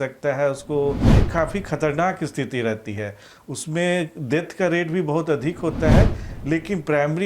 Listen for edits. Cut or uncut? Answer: cut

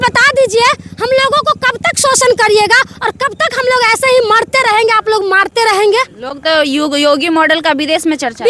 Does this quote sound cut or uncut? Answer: uncut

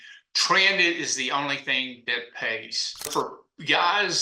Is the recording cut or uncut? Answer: cut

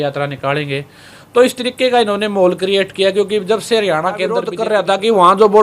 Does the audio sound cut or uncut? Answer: cut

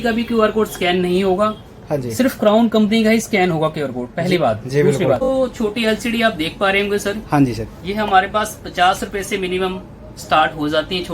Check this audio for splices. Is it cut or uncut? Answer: cut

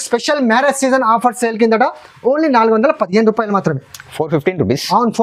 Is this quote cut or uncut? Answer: uncut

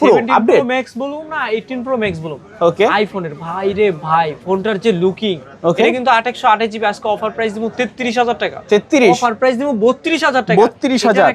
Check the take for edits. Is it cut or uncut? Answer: uncut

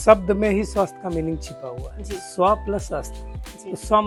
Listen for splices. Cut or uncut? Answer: uncut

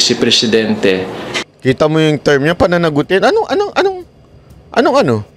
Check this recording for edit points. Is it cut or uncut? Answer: uncut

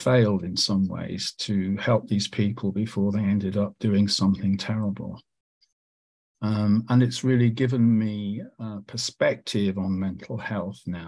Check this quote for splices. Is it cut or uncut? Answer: uncut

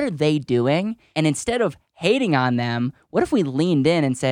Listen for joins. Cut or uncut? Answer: cut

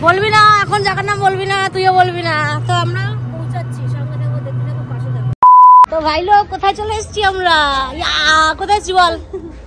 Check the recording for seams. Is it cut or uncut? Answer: uncut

